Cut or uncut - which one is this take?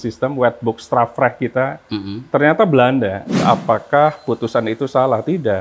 cut